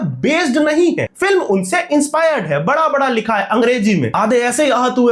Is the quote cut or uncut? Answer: cut